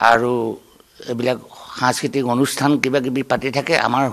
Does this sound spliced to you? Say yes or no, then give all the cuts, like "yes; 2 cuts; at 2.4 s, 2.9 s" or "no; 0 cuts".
no; 0 cuts